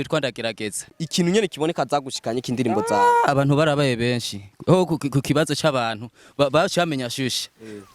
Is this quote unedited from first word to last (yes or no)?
no